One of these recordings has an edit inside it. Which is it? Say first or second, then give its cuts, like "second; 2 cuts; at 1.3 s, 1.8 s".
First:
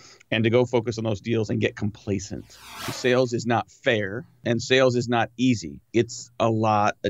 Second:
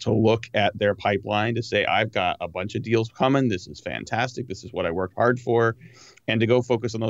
first; 3 cuts; at 2.9 s, 4.4 s, 5.8 s